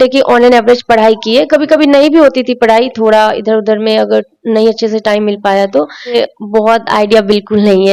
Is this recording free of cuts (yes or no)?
no